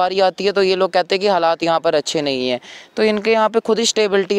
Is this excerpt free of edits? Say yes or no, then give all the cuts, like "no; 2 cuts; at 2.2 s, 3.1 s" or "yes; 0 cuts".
yes; 0 cuts